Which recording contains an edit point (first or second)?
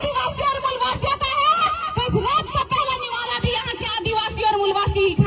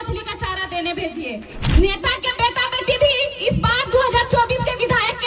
second